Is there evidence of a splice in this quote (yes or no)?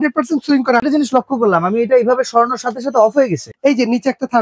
yes